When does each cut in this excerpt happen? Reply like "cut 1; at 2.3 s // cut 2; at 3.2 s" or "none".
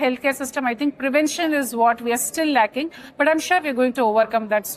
none